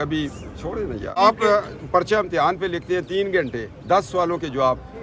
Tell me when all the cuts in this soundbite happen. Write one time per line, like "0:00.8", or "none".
0:01.2